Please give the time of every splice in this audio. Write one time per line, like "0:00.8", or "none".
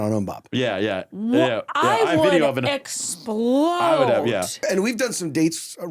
0:04.6